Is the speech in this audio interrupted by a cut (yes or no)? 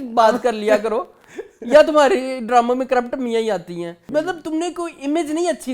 yes